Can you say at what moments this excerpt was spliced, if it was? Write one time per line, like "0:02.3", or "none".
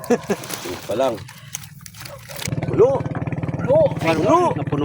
0:02.5